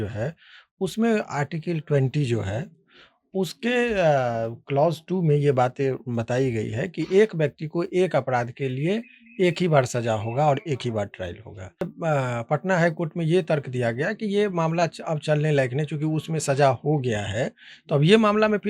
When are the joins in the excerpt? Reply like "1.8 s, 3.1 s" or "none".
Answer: 11.9 s